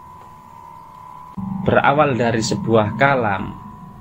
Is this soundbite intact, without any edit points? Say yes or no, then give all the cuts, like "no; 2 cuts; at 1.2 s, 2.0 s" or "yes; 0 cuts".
no; 1 cut; at 1.3 s